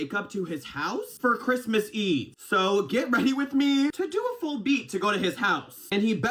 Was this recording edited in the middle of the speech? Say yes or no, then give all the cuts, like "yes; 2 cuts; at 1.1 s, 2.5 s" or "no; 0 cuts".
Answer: no; 0 cuts